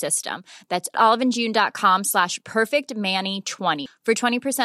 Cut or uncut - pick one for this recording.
uncut